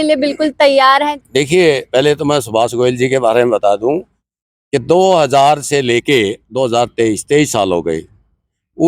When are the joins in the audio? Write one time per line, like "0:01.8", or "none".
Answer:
0:01.1
0:04.2